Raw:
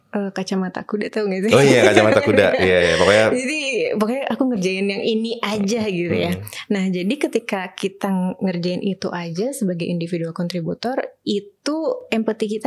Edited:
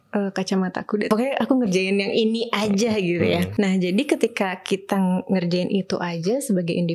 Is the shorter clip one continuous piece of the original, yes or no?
no